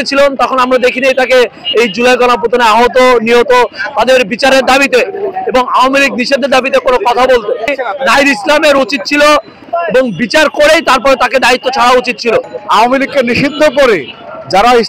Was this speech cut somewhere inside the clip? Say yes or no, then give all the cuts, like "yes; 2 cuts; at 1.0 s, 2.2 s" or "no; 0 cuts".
yes; 3 cuts; at 7.7 s, 9.7 s, 12.4 s